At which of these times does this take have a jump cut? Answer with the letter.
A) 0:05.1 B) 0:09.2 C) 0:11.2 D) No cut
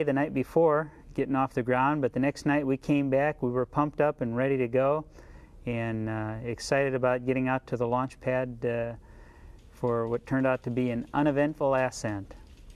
D